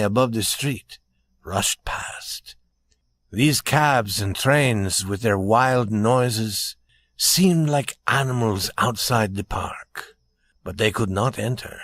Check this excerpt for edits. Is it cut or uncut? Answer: uncut